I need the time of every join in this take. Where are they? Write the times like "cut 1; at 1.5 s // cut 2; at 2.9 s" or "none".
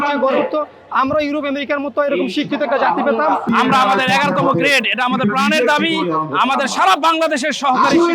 cut 1; at 3.5 s